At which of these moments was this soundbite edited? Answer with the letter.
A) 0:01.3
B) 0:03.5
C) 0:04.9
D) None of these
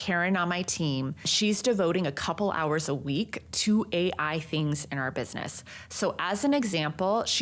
A